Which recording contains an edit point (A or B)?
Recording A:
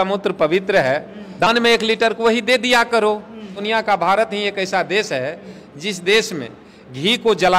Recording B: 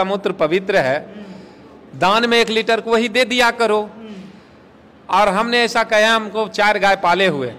A